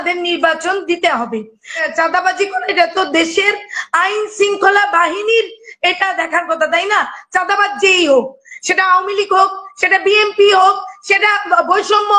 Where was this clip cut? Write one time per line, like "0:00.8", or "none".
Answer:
0:01.9